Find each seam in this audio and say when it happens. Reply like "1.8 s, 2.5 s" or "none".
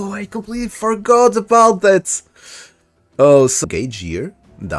3.6 s